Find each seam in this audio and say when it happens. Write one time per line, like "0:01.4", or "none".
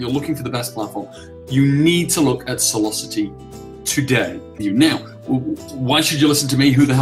0:04.6